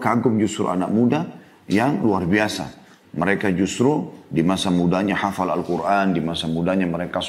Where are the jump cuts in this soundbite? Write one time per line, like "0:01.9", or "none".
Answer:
none